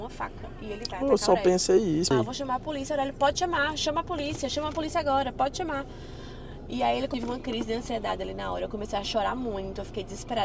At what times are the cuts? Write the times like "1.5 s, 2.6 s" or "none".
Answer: 2.1 s, 7.1 s